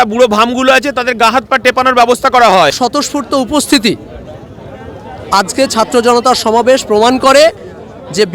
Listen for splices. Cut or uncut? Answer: cut